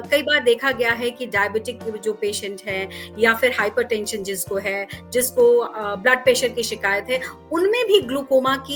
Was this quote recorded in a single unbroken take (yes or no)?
yes